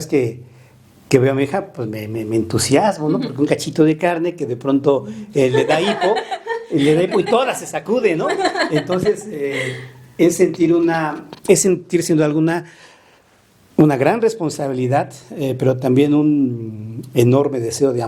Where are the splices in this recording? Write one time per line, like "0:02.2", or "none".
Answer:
none